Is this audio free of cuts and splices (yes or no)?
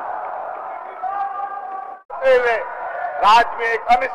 no